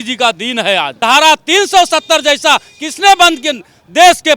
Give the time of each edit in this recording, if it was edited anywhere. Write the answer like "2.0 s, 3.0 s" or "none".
0.9 s